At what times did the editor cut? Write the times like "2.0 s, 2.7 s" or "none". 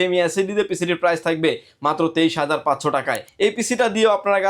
3.3 s